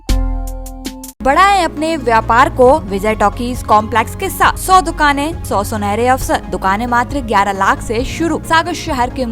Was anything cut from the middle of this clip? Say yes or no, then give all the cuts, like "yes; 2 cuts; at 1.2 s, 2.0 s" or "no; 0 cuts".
yes; 6 cuts; at 1.2 s, 2.9 s, 4.6 s, 5.4 s, 6.5 s, 8.4 s